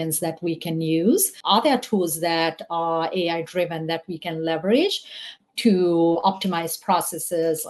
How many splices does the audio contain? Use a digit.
1